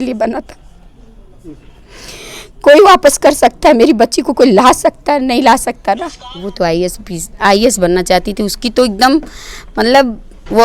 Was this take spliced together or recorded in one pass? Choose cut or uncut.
cut